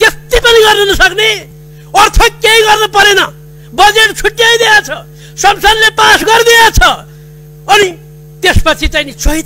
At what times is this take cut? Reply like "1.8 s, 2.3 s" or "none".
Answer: none